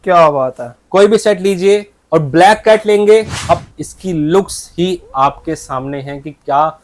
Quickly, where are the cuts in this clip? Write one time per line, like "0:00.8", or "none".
0:03.4